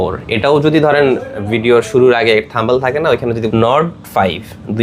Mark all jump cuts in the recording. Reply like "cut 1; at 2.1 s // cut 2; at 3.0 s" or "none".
cut 1; at 3.5 s